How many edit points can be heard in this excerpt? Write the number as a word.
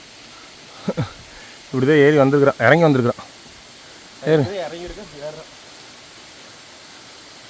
zero